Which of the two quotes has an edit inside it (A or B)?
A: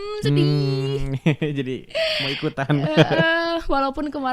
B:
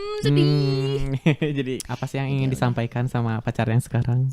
B